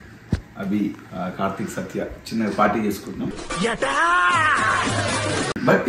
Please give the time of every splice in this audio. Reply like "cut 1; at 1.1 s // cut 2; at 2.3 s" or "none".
cut 1; at 1.0 s // cut 2; at 3.4 s

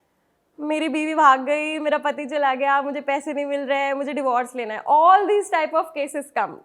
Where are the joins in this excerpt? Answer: none

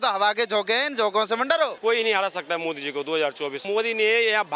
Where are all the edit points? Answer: cut 1; at 1.8 s // cut 2; at 3.6 s

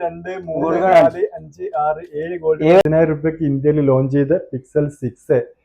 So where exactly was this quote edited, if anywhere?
cut 1; at 2.8 s

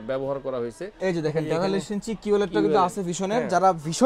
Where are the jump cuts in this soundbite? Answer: cut 1; at 0.9 s

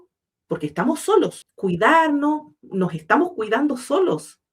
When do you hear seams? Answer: cut 1; at 1.4 s

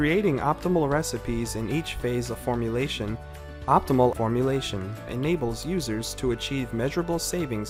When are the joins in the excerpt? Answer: none

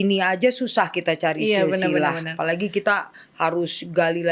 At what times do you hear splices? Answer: none

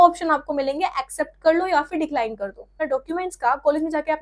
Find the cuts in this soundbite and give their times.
cut 1; at 2.7 s

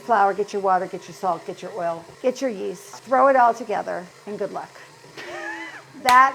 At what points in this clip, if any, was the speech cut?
cut 1; at 2.9 s // cut 2; at 4.2 s

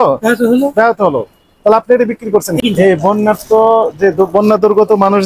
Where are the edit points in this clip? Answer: cut 1; at 2.6 s

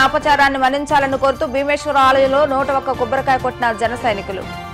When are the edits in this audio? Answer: none

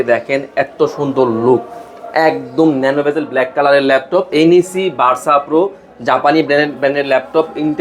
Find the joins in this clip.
cut 1; at 4.3 s

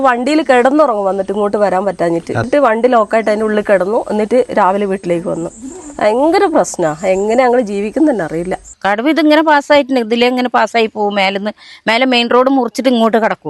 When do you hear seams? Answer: cut 1; at 2.5 s // cut 2; at 8.7 s

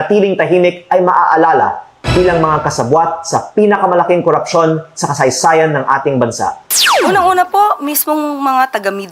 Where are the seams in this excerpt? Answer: cut 1; at 6.6 s

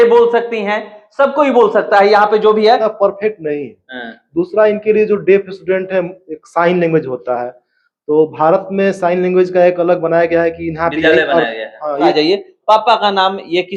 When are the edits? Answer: cut 1; at 2.9 s // cut 2; at 12.1 s

